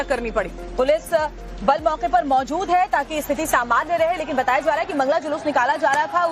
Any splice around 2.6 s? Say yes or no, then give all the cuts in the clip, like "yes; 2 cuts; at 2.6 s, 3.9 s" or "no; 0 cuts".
yes; 1 cut; at 2.6 s